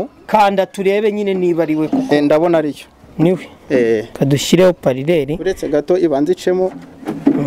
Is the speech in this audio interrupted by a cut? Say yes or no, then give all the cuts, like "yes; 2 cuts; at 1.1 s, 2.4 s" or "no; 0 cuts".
no; 0 cuts